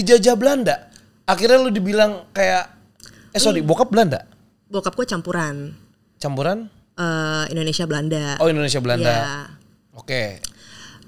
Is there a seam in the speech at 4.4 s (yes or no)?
no